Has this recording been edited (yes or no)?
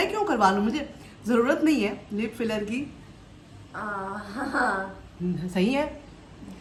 no